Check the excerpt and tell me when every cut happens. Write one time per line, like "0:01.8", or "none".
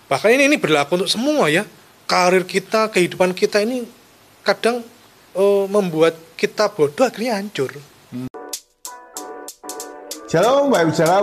0:08.3